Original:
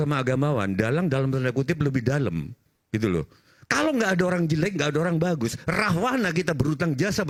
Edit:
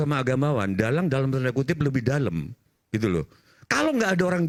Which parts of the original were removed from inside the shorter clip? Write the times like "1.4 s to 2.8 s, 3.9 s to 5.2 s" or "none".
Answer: none